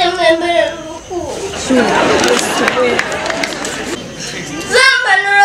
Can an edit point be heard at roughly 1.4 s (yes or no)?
no